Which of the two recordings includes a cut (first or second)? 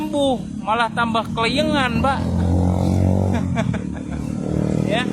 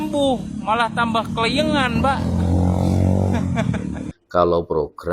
second